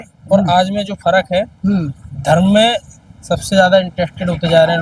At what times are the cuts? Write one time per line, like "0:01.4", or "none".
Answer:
none